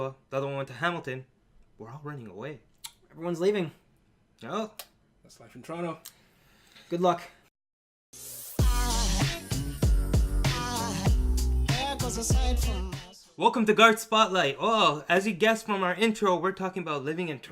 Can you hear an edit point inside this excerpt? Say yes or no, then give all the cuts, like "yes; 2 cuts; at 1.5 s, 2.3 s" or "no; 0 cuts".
yes; 1 cut; at 15.7 s